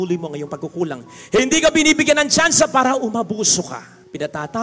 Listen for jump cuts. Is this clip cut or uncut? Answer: uncut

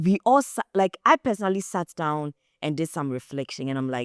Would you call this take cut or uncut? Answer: uncut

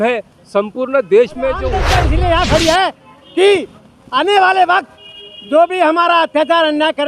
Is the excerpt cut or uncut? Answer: cut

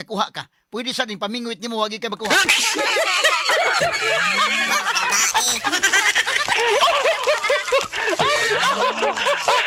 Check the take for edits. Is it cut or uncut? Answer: uncut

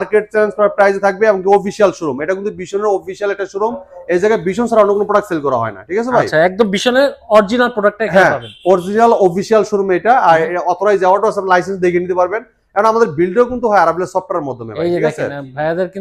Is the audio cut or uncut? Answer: uncut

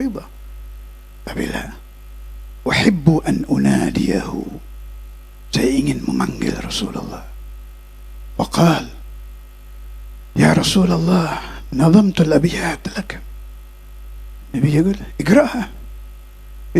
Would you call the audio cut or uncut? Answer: uncut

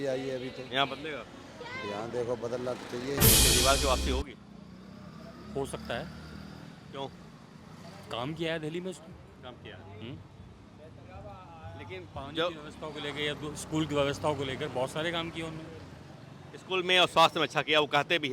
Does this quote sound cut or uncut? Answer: cut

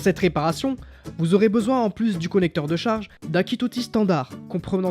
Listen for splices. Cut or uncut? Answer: cut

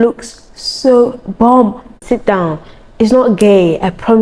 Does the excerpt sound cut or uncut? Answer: cut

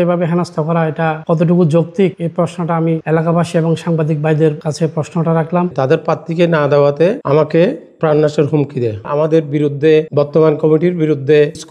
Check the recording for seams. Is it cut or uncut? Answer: cut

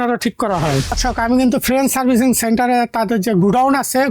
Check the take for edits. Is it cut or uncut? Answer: cut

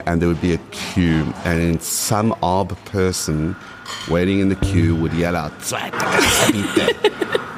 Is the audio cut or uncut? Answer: uncut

